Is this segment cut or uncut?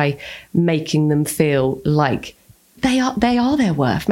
uncut